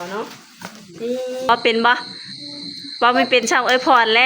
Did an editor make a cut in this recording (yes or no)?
yes